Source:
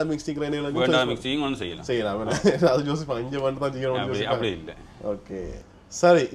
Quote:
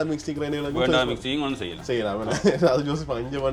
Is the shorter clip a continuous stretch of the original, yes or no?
yes